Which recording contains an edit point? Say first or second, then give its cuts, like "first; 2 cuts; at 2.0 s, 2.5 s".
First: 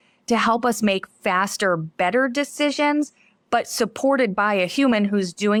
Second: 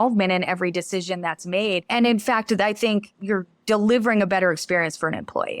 second; 2 cuts; at 1.9 s, 3.1 s